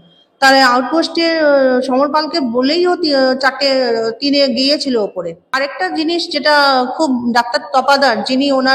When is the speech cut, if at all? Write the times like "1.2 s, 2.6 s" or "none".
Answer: 5.5 s